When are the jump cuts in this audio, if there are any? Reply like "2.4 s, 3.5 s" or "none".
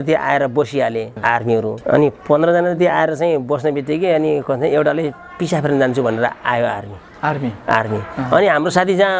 1.4 s

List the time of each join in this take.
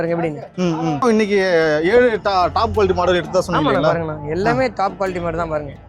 1.0 s

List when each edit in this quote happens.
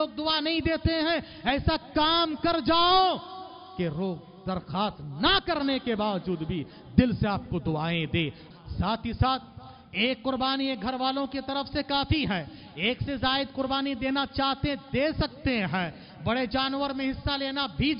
8.5 s

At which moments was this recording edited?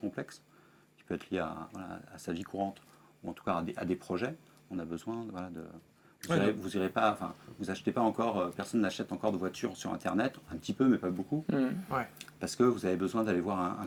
none

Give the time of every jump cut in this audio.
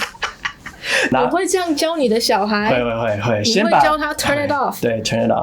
1.1 s

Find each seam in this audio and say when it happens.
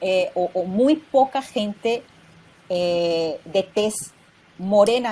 none

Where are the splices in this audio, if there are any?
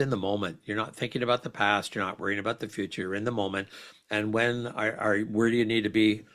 none

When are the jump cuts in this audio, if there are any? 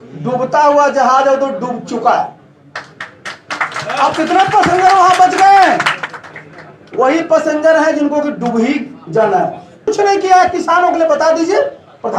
9.9 s

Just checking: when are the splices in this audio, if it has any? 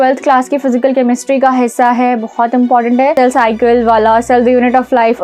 3.1 s

